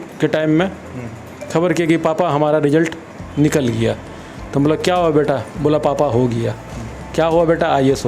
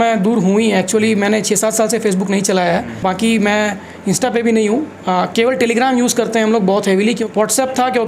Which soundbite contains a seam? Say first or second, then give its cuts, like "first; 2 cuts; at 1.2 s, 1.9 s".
second; 2 cuts; at 3.0 s, 7.2 s